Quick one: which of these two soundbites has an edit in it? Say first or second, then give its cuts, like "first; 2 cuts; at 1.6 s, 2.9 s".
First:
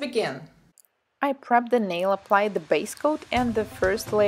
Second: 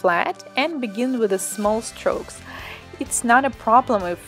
first; 1 cut; at 2.6 s